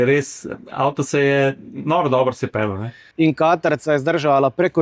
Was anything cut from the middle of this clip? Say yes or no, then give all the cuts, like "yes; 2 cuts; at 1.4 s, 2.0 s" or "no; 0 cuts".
yes; 1 cut; at 3.0 s